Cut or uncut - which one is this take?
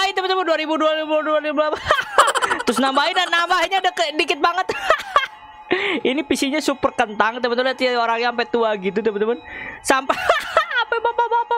uncut